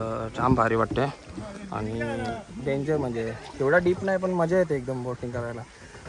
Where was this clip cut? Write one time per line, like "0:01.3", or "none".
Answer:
none